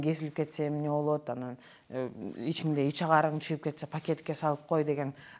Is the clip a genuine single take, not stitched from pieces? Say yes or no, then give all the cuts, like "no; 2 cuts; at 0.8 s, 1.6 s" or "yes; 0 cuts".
yes; 0 cuts